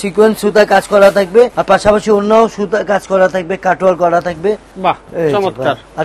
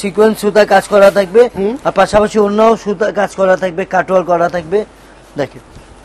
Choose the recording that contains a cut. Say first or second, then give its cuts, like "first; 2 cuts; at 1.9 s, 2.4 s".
first; 2 cuts; at 1.5 s, 4.7 s